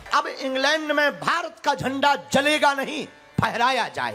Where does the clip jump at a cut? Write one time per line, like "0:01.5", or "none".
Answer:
none